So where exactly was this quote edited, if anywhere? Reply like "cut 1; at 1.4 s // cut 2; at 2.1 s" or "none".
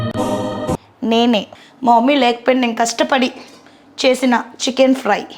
cut 1; at 1.5 s